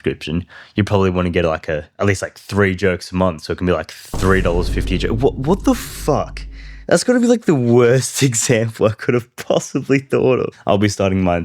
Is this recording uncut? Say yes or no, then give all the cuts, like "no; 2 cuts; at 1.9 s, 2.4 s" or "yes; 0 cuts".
no; 1 cut; at 10.5 s